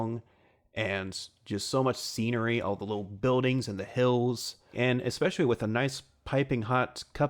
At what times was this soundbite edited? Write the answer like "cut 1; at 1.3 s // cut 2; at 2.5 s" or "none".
cut 1; at 4.7 s